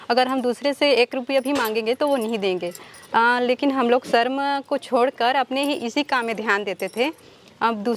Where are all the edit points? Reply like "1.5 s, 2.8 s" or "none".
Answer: none